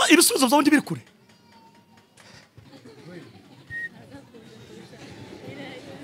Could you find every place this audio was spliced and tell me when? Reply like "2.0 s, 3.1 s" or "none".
2.7 s